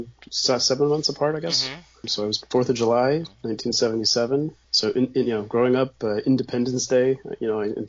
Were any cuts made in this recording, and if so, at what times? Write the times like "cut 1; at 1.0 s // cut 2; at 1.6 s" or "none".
cut 1; at 2.3 s // cut 2; at 4.6 s